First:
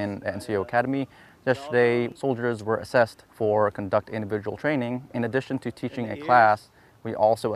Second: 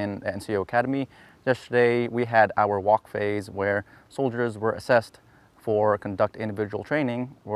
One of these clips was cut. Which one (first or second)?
first